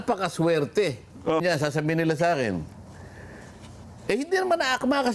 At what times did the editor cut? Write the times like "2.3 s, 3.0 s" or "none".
1.4 s

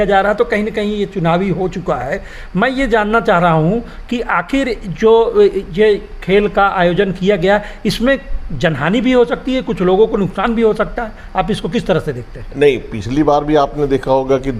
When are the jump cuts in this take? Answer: none

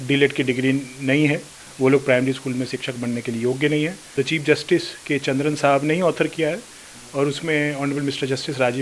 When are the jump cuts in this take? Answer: 4.0 s

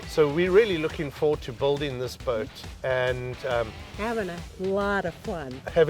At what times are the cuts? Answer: 2.6 s

